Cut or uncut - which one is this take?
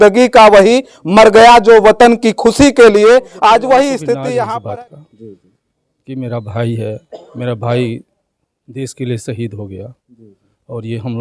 cut